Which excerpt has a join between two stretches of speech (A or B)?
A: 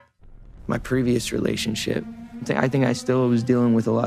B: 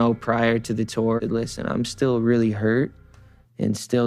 B